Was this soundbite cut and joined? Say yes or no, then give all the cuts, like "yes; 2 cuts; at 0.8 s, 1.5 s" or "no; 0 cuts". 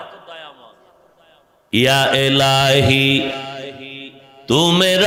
no; 0 cuts